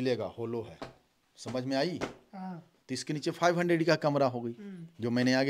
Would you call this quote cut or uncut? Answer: uncut